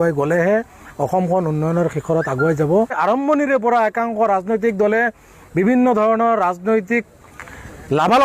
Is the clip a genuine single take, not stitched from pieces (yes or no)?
no